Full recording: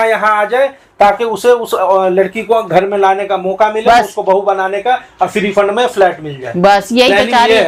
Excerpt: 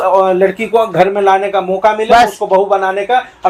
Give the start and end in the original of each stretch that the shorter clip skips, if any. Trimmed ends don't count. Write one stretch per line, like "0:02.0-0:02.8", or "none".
none